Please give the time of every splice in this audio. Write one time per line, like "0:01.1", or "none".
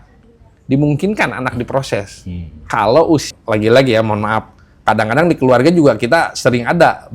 0:03.3